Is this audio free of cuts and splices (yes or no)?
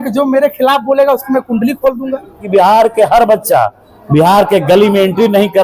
no